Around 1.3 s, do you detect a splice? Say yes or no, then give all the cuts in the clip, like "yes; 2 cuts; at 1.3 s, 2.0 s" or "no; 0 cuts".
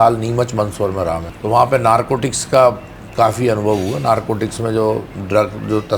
yes; 1 cut; at 1.3 s